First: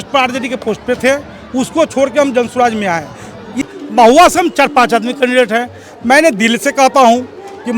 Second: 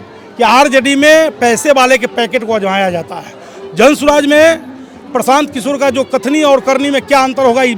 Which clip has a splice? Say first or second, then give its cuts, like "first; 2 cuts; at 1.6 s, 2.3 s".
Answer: first; 1 cut; at 3.7 s